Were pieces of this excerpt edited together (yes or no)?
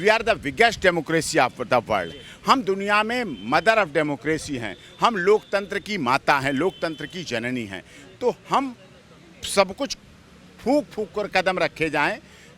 no